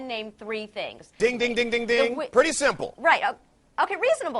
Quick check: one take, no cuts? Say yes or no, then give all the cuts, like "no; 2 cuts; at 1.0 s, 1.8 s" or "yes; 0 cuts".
no; 1 cut; at 1.1 s